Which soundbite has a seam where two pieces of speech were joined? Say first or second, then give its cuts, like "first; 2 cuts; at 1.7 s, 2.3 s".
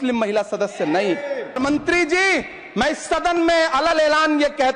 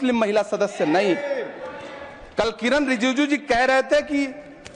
first; 1 cut; at 1.6 s